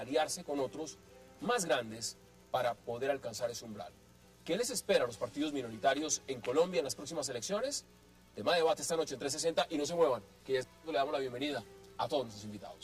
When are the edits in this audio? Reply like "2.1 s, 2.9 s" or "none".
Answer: 10.1 s